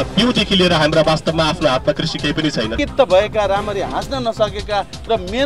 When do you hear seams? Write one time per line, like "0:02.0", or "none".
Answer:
0:02.7